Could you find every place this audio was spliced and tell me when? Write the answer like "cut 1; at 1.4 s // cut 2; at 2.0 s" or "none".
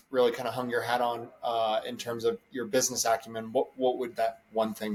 none